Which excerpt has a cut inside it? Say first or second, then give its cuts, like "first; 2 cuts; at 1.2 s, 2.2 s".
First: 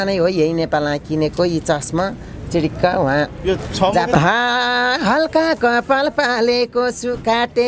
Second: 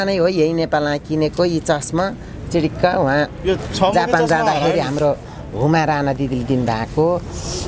first; 1 cut; at 4.2 s